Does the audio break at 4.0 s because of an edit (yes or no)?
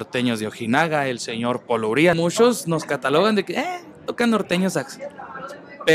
no